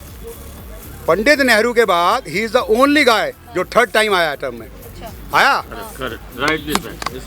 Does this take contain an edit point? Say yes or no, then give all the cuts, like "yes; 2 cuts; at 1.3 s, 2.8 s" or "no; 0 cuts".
no; 0 cuts